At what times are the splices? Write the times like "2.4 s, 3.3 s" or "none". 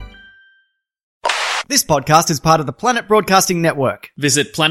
1.3 s